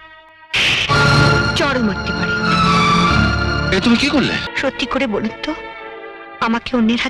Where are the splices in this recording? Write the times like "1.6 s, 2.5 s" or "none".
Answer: 4.5 s